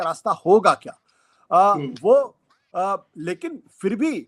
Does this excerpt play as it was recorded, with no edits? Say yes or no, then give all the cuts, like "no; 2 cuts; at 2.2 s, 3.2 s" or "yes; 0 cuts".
yes; 0 cuts